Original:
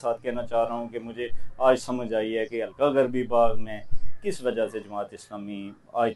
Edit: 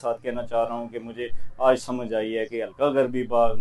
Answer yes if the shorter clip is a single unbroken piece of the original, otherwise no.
yes